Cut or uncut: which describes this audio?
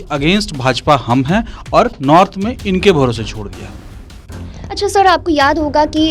uncut